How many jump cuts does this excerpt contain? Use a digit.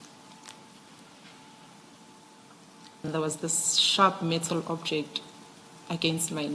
1